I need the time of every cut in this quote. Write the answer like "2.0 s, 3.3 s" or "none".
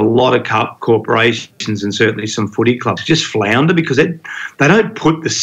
none